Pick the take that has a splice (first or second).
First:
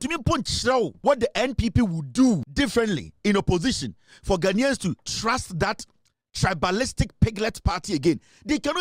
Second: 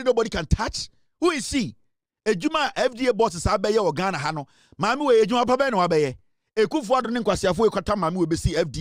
first